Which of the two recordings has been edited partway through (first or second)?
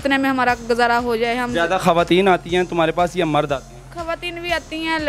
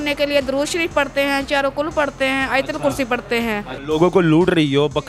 second